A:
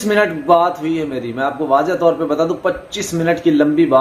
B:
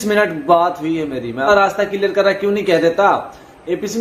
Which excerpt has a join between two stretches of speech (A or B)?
B